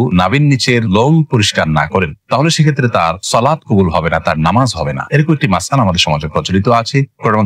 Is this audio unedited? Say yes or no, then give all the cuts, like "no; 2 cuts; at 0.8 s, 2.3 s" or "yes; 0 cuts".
yes; 0 cuts